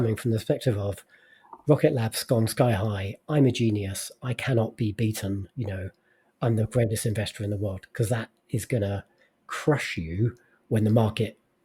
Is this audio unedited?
yes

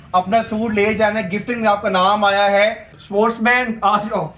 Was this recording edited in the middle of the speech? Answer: yes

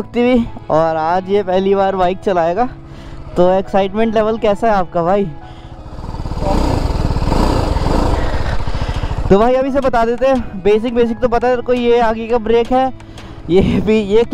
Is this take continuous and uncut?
yes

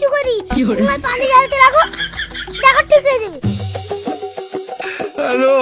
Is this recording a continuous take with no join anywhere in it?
yes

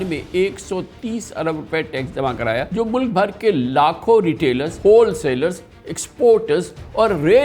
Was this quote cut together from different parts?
yes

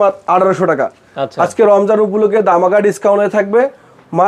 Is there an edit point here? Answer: no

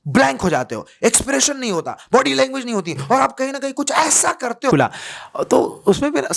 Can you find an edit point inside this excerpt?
yes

